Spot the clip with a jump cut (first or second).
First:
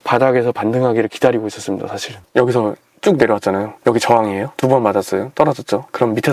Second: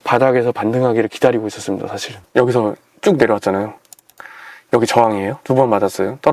first